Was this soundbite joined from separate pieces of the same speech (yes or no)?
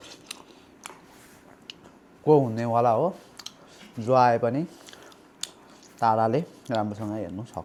no